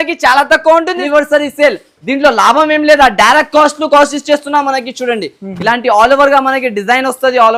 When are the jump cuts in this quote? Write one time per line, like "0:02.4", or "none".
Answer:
0:01.0

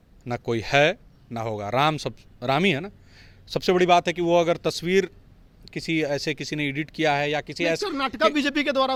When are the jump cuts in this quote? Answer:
none

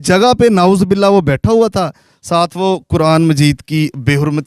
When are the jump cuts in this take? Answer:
none

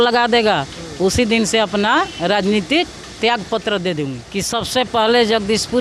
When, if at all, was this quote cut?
0:04.2

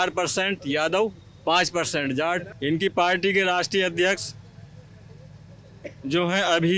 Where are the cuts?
0:02.5

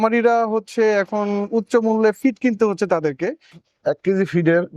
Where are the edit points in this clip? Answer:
0:03.6

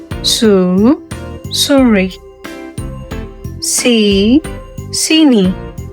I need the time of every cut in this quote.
0:02.1
0:03.7

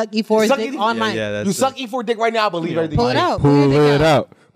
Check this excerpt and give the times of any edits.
0:03.4

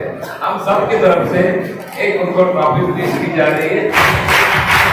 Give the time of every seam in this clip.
0:03.9

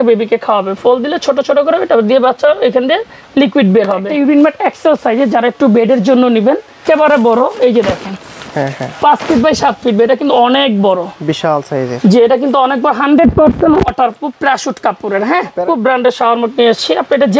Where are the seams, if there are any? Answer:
0:04.1
0:06.8
0:15.6

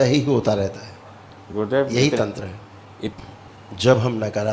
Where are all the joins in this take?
0:03.1

